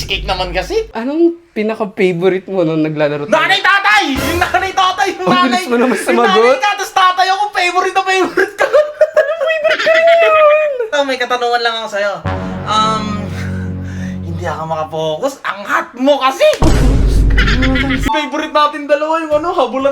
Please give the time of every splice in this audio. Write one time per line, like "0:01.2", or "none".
0:00.9
0:10.9
0:18.0

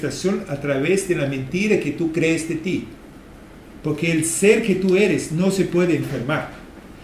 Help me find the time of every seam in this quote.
none

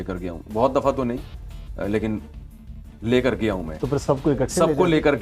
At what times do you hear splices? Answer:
none

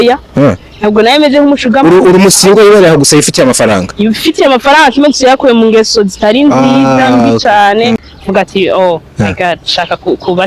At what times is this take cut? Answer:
0:08.0

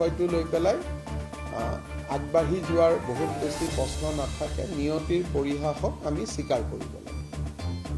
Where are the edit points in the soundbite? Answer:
0:07.1

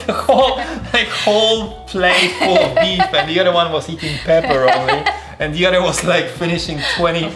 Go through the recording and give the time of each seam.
none

